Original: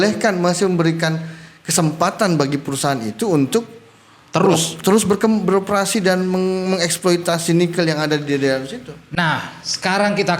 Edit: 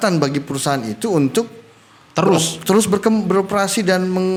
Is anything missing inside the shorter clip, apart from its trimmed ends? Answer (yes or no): no